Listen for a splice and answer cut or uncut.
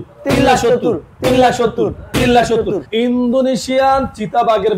uncut